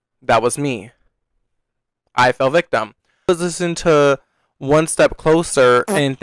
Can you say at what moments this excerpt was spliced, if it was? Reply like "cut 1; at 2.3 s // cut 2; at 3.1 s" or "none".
cut 1; at 3.3 s